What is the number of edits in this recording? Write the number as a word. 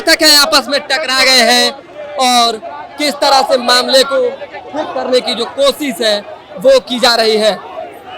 zero